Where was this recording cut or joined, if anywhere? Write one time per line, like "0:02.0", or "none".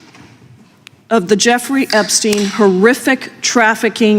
none